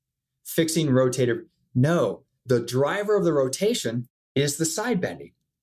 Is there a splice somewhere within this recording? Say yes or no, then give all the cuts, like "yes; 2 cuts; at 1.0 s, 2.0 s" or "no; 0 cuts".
yes; 1 cut; at 2.4 s